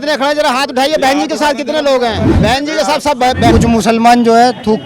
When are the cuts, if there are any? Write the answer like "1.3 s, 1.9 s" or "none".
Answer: 2.3 s, 3.5 s